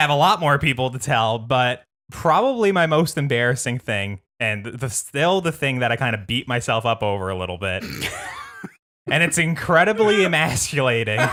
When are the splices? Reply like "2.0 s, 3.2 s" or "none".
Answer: none